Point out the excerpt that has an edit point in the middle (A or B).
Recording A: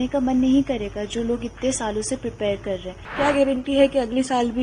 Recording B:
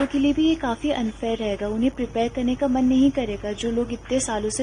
A